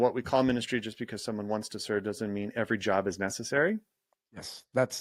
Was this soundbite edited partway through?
no; 0 cuts

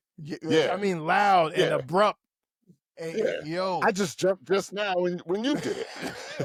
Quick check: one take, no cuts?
yes; 0 cuts

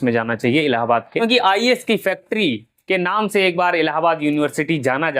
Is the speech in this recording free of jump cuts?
no; 1 cut; at 1.6 s

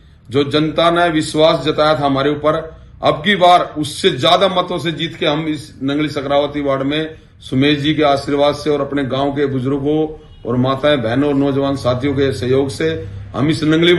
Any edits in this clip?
no; 0 cuts

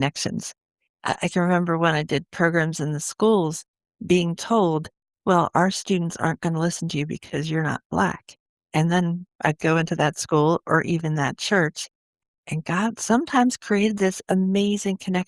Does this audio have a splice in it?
yes; 1 cut; at 12.1 s

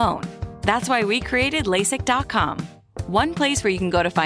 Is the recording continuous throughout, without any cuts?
yes; 0 cuts

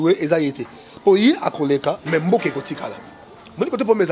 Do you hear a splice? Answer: no; 0 cuts

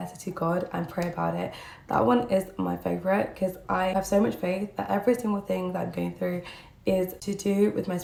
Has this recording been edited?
no; 0 cuts

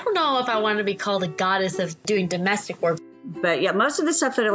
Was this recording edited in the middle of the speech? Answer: yes; 2 cuts; at 2.0 s, 3.1 s

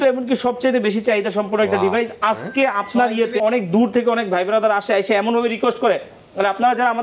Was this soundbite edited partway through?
yes; 1 cut; at 3.4 s

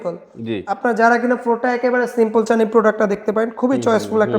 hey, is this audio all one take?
yes; 0 cuts

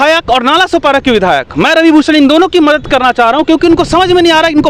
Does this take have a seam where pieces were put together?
no; 0 cuts

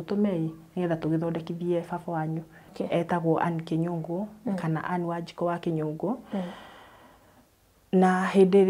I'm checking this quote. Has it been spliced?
yes; 1 cut; at 2.7 s

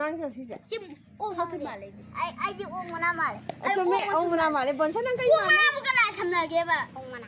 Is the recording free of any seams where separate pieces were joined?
yes; 0 cuts

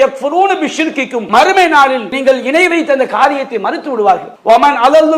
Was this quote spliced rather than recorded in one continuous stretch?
yes; 2 cuts; at 1.2 s, 4.3 s

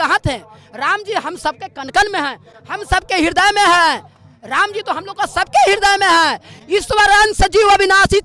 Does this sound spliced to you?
no; 0 cuts

